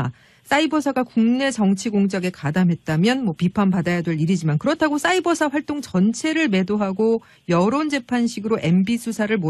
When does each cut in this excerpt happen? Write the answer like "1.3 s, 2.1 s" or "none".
2.0 s